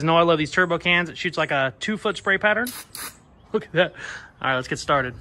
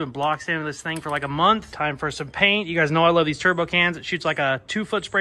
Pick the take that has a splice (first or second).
second